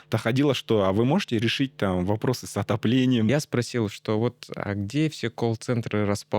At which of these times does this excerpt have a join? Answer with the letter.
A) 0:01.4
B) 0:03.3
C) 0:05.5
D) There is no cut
B